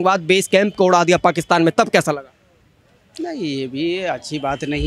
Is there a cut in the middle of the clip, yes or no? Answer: no